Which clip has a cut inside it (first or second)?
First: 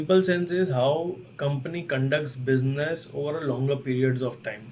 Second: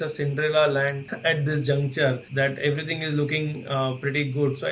second